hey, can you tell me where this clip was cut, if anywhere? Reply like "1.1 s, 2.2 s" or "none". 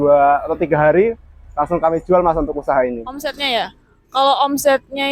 3.4 s